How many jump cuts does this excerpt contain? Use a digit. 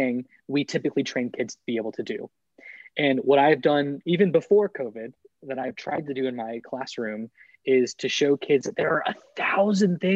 0